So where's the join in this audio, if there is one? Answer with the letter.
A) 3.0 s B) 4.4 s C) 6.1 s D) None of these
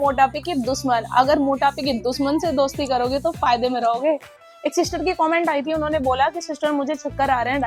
D